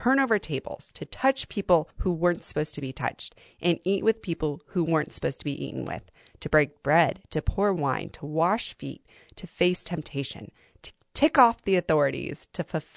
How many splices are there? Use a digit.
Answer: 1